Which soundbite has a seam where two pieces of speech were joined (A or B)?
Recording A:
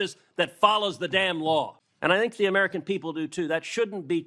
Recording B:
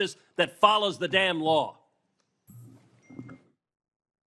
A